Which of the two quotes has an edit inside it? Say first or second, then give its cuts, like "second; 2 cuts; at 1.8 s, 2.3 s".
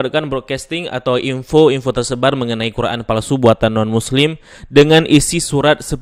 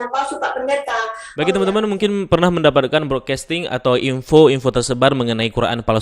second; 1 cut; at 1.2 s